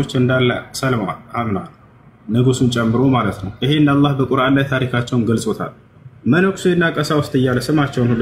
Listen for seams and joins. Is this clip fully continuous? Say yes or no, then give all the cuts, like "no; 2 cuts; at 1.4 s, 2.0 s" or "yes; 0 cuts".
yes; 0 cuts